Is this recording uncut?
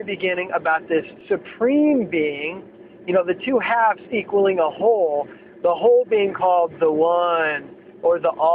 yes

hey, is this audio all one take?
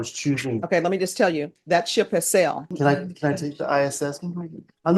no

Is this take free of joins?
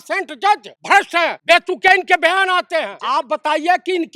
no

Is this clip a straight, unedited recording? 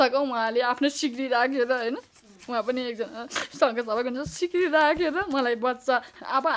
yes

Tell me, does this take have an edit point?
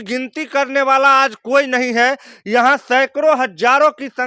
no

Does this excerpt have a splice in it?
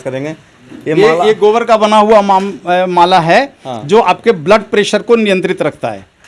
no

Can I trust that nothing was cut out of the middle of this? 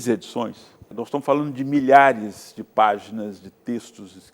no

